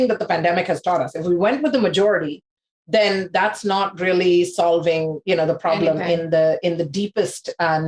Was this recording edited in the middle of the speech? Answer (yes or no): no